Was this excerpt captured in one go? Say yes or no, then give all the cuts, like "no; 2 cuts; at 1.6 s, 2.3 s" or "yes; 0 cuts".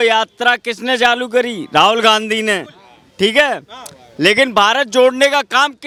yes; 0 cuts